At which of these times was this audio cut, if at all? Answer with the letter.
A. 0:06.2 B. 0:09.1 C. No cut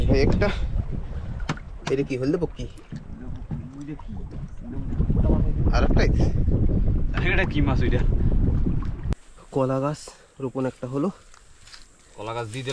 B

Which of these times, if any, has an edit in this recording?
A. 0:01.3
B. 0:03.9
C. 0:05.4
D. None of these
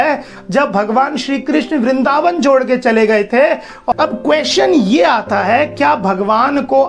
B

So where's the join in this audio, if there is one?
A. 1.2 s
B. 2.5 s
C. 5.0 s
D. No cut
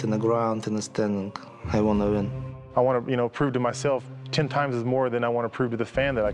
B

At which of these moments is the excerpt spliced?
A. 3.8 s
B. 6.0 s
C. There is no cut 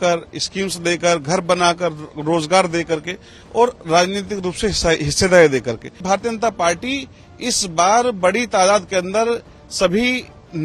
B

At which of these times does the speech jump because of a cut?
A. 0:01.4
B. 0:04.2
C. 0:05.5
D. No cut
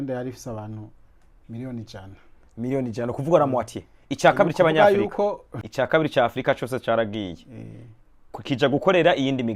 C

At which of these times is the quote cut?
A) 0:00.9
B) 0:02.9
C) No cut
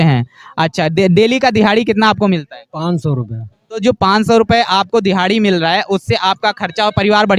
C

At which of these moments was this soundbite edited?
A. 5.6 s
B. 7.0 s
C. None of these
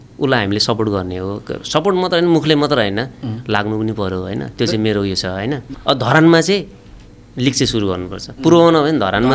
A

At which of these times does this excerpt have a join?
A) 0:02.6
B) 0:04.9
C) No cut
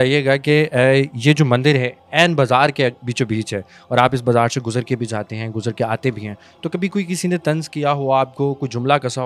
C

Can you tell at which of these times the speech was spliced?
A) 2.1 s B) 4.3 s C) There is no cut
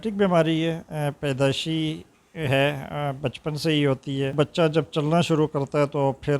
B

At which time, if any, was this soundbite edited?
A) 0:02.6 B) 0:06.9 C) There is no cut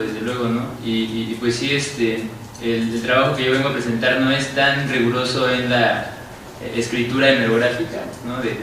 B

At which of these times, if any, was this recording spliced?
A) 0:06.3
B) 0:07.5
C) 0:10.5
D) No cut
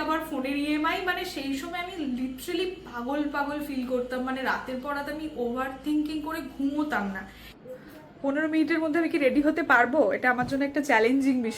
B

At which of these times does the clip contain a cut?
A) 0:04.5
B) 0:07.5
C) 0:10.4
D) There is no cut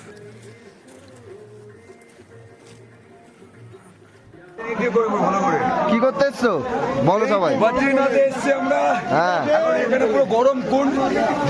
A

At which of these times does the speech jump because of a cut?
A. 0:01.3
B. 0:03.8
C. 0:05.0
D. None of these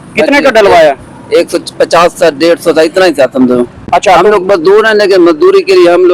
D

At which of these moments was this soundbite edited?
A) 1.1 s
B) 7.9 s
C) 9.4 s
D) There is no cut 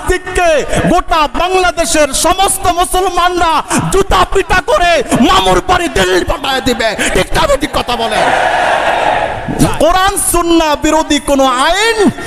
C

